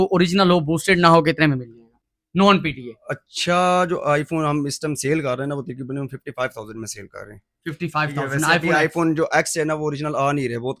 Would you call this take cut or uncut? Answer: uncut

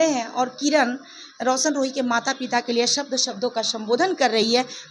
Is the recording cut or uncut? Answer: uncut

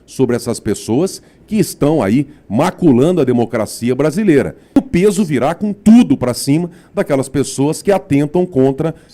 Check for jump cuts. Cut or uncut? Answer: cut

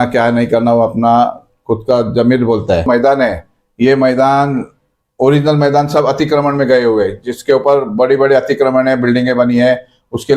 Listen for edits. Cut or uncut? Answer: cut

